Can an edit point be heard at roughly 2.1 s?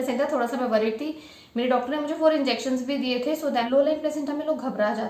no; 1 cut; at 3.6 s

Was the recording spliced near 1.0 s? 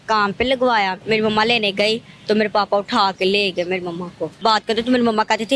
yes; 2 cuts; at 1.0 s, 4.4 s

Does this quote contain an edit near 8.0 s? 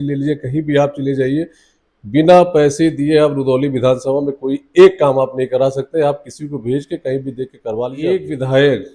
yes; 1 cut; at 8.0 s

